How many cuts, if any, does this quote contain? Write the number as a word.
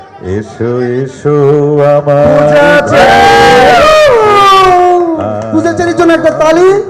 zero